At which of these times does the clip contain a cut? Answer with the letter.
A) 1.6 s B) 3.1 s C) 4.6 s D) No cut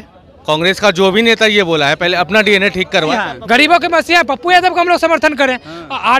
B